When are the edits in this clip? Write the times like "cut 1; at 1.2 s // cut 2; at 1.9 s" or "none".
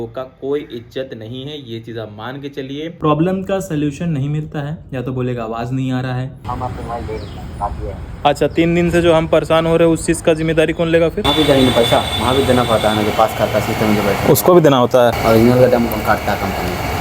cut 1; at 3.0 s // cut 2; at 6.4 s // cut 3; at 11.2 s // cut 4; at 15.2 s